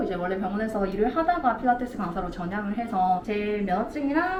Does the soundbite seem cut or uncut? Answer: uncut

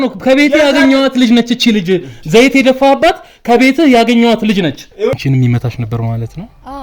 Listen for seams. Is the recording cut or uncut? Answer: cut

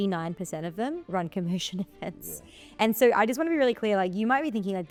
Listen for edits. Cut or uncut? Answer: uncut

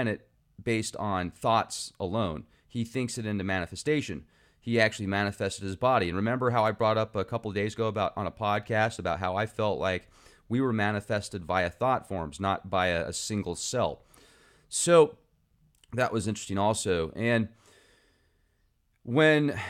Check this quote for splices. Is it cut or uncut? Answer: uncut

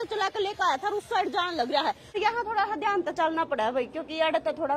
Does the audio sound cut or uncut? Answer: cut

